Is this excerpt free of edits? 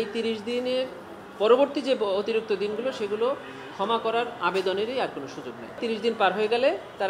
no; 1 cut; at 5.8 s

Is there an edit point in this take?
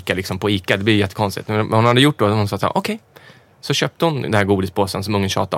no; 0 cuts

